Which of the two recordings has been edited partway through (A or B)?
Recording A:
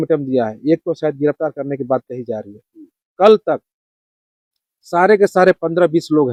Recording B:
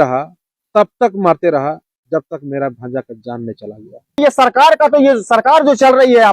B